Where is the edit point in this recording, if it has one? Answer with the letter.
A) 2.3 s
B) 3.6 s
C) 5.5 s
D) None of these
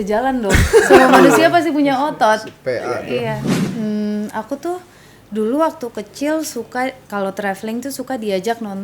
B